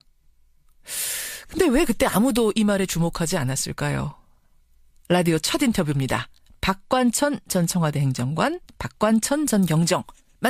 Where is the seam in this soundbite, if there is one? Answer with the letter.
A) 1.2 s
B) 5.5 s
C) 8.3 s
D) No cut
C